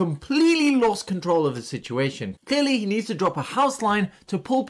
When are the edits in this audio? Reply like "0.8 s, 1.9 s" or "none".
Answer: 2.3 s

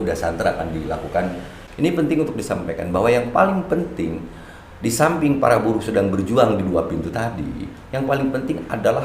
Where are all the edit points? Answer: 1.6 s

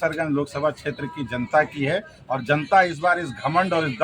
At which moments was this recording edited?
none

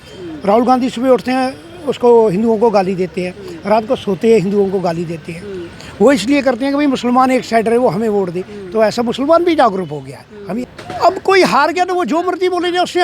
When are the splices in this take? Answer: 10.7 s

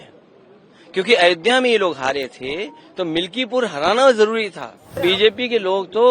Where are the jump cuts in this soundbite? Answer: 5.0 s

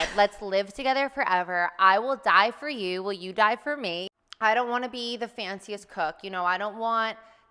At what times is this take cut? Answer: 4.0 s

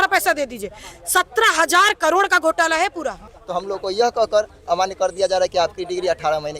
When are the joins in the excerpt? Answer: 3.4 s

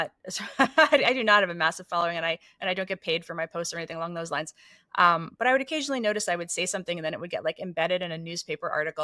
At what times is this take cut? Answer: none

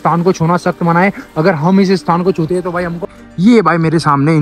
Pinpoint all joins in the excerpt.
3.2 s

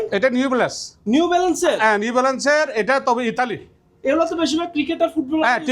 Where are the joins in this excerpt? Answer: none

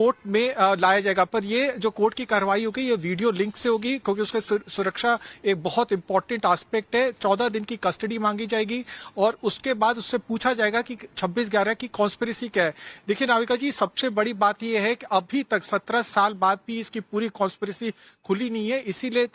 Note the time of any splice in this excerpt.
11.5 s

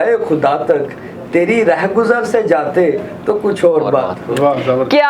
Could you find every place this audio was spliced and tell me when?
none

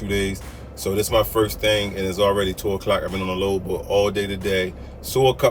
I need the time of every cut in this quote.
none

